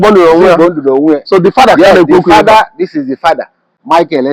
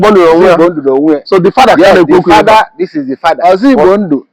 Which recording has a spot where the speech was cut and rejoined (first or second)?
second